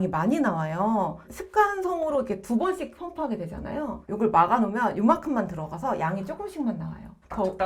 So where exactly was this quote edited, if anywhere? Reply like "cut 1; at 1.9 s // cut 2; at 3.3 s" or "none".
none